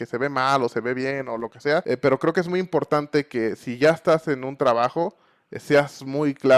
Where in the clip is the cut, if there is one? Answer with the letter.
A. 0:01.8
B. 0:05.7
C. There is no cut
A